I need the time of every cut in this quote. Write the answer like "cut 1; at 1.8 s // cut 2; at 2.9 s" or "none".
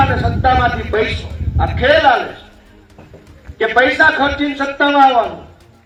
none